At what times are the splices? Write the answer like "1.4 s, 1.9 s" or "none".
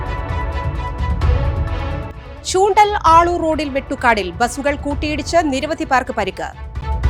none